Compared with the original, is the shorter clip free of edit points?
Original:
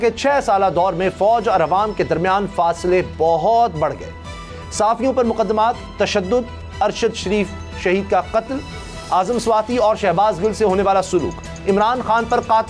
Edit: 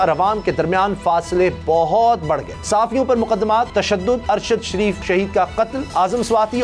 no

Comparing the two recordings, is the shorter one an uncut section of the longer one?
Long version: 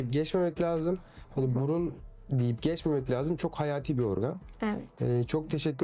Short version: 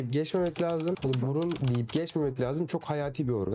no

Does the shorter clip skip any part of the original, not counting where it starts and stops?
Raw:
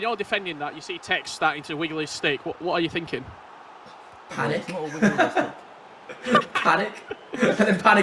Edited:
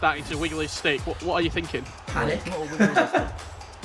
yes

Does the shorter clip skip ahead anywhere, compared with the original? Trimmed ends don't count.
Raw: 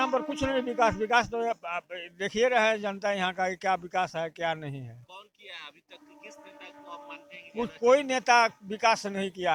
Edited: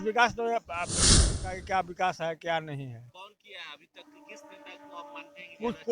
yes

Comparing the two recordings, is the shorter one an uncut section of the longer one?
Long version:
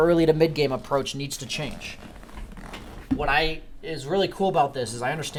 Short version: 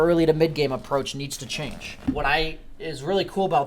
no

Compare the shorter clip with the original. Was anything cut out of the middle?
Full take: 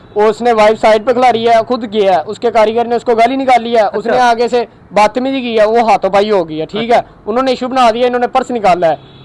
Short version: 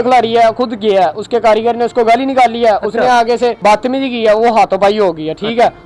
yes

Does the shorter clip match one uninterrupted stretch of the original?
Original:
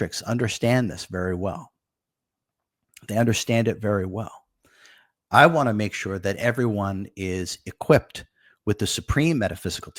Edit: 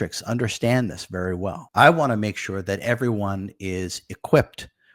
no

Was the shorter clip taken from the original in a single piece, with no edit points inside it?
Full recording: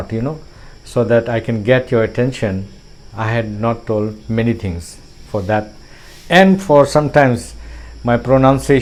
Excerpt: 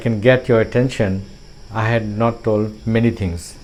yes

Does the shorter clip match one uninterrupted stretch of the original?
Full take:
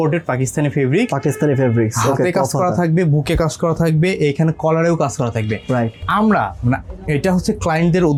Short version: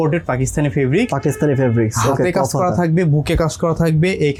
yes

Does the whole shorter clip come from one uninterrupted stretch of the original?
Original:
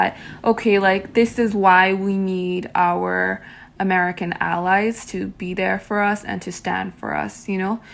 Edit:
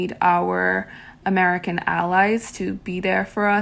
yes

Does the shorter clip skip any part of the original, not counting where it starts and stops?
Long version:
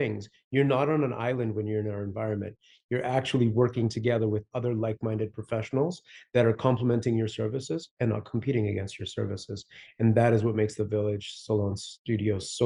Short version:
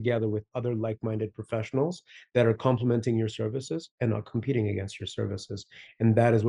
no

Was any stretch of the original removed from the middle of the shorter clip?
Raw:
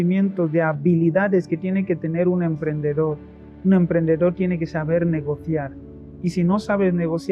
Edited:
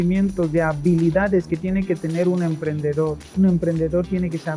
yes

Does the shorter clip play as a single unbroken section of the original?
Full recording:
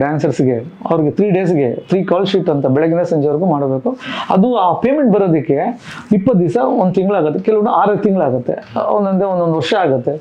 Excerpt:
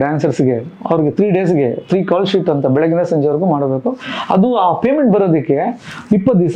yes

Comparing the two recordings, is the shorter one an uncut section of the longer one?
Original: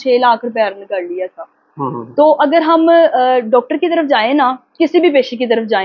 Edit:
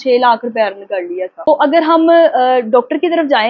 no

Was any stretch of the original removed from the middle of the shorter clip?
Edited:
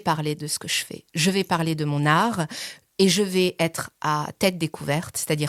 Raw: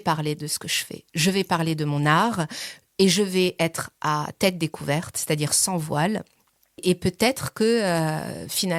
no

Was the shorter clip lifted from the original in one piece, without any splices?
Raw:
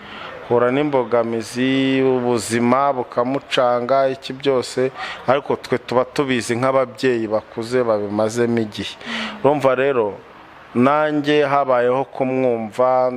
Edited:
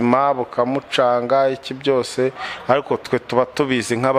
yes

